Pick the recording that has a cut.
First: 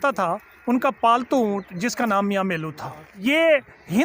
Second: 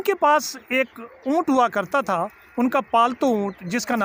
first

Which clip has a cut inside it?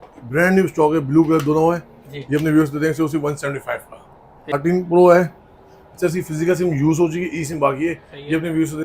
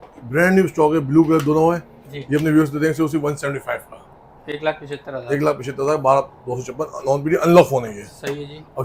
first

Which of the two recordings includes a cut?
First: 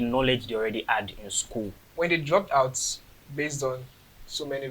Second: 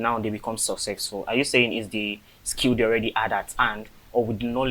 first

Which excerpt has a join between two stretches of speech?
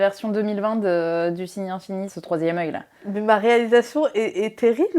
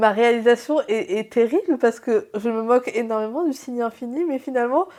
first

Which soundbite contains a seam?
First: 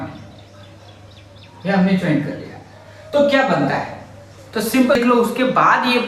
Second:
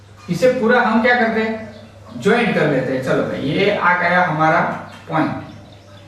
first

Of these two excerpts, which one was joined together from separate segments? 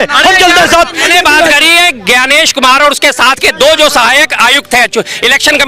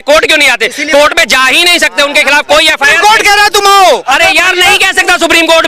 first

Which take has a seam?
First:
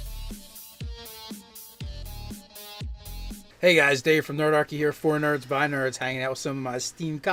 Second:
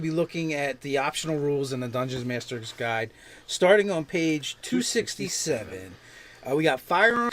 second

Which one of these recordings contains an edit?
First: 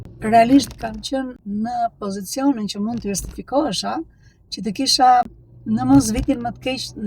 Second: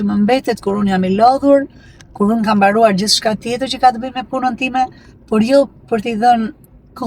first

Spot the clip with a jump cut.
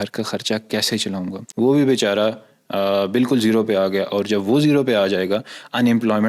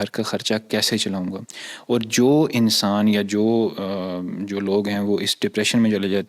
first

